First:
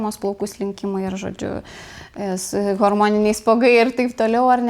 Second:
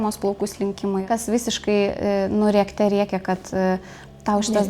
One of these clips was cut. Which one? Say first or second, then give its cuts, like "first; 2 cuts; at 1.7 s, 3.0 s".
second; 1 cut; at 1.1 s